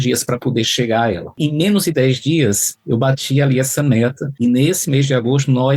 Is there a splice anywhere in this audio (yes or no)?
yes